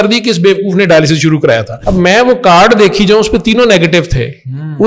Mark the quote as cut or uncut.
cut